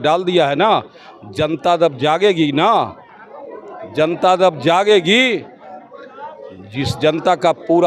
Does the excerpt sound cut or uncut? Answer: uncut